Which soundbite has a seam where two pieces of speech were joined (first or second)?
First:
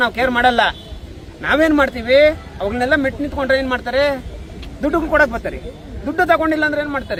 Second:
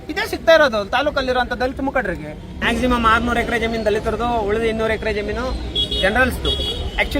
second